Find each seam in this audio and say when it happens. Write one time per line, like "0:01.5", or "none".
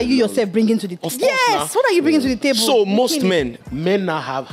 0:03.6